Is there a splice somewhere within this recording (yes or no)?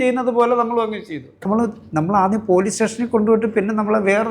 yes